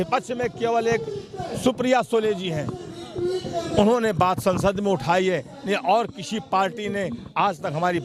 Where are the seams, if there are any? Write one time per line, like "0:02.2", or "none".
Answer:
none